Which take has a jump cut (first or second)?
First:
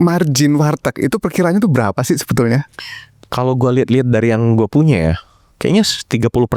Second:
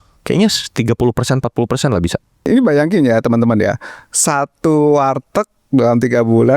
second